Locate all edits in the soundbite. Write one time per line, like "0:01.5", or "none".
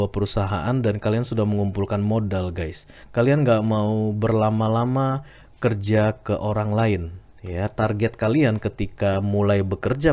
none